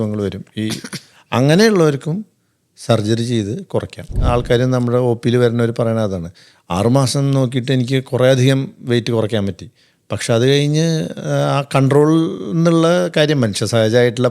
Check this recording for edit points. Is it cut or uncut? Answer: cut